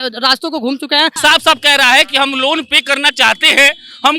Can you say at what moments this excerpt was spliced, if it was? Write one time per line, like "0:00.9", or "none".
0:01.2